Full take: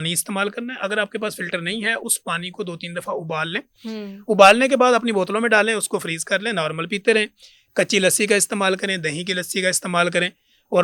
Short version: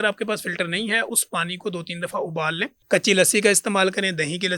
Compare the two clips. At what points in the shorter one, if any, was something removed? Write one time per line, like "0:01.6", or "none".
0:02.7